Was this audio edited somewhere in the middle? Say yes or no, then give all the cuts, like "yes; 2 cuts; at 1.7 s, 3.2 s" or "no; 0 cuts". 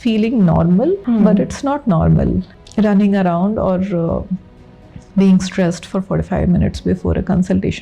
yes; 2 cuts; at 1.0 s, 2.6 s